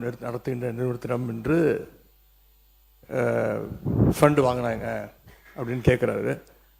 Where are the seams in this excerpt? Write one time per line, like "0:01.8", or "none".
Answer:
none